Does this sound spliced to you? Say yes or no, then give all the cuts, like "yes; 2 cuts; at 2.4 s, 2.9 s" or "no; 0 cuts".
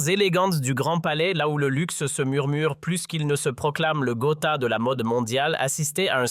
yes; 1 cut; at 3.3 s